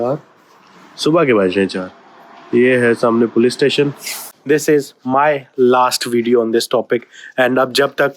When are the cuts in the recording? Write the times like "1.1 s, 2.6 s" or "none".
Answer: 4.3 s